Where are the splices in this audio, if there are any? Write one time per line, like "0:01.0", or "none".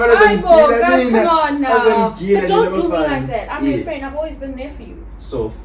none